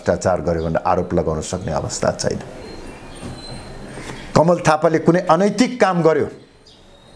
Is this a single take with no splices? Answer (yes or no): yes